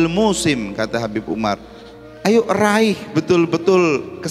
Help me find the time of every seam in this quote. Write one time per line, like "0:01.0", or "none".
none